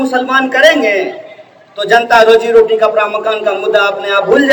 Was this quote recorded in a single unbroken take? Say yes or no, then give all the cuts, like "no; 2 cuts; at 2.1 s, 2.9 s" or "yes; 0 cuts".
yes; 0 cuts